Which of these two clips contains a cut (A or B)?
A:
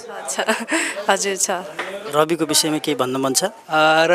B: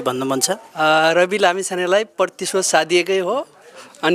A